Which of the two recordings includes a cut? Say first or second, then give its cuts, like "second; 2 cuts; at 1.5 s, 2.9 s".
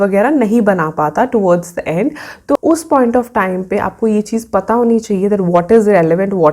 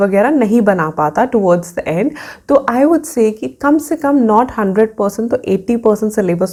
first; 1 cut; at 2.5 s